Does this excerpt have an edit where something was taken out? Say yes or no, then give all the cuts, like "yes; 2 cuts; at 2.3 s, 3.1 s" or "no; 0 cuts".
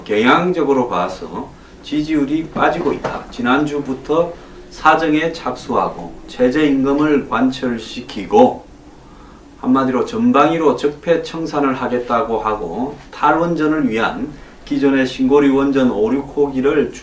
yes; 1 cut; at 13.5 s